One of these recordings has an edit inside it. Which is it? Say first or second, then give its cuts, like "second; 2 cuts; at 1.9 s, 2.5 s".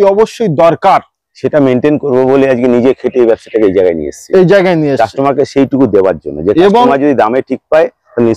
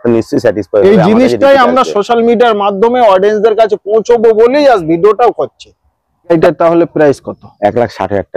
second; 1 cut; at 6.3 s